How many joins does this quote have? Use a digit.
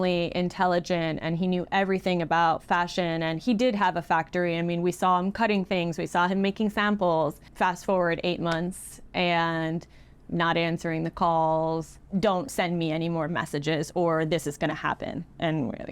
2